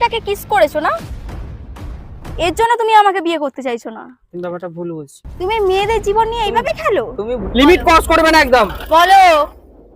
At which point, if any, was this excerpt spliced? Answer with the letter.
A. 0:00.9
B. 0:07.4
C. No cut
B